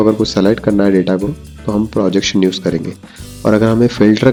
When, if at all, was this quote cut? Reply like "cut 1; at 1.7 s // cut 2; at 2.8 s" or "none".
none